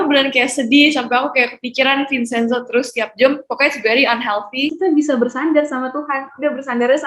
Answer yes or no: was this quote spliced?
yes